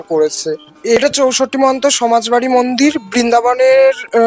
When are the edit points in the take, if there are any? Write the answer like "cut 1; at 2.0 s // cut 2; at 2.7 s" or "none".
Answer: cut 1; at 1.0 s